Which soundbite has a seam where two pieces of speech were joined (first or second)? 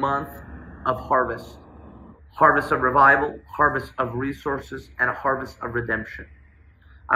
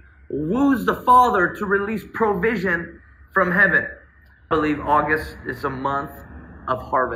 second